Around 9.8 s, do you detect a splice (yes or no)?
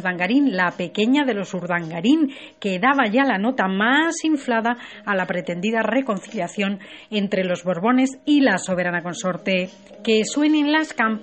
no